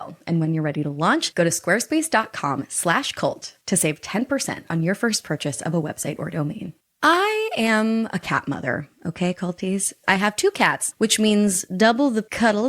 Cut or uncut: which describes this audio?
uncut